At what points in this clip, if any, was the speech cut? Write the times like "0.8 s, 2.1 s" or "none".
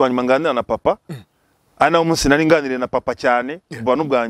none